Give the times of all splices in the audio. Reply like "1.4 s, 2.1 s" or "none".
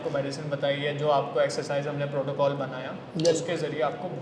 none